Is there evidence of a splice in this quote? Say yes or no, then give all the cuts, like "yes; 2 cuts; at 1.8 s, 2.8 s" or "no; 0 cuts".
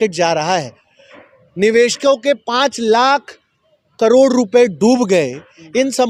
no; 0 cuts